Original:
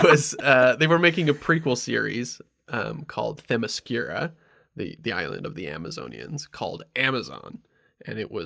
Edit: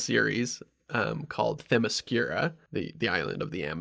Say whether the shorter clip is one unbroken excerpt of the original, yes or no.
no